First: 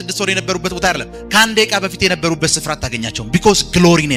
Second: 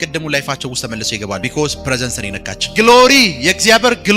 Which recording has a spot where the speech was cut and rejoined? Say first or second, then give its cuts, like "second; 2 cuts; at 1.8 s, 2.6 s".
second; 2 cuts; at 1.4 s, 2.5 s